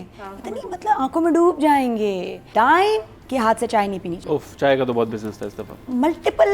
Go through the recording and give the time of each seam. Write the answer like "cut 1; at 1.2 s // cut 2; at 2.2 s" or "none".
cut 1; at 2.4 s // cut 2; at 3.2 s // cut 3; at 4.1 s